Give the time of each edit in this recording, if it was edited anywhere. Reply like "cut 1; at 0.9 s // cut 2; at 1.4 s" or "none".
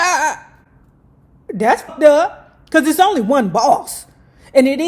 cut 1; at 1.9 s